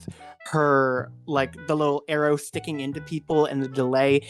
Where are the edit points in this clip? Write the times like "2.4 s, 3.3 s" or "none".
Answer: none